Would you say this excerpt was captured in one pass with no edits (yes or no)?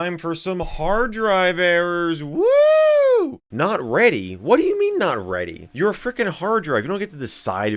no